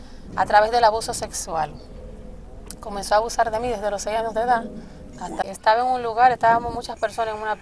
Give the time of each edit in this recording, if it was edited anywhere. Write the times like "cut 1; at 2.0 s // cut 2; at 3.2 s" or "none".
cut 1; at 5.4 s

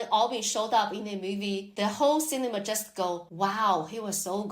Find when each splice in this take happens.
cut 1; at 1.7 s // cut 2; at 3.3 s

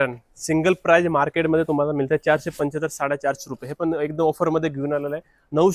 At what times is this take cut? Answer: none

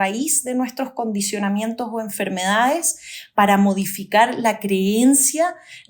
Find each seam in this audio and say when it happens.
none

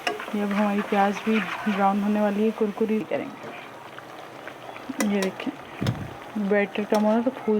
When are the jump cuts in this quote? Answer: cut 1; at 3.0 s

